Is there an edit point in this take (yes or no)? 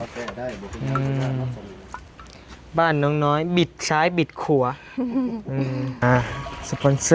yes